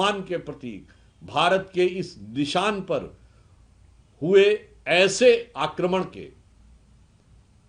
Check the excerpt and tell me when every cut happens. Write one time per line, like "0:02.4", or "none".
none